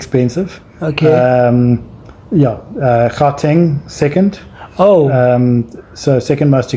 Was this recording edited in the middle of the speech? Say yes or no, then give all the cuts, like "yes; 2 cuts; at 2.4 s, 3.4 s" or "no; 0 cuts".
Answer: no; 0 cuts